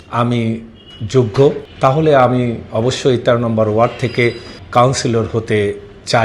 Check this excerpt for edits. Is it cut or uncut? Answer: cut